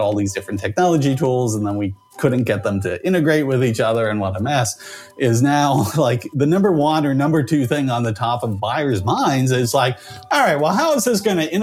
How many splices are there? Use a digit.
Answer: 0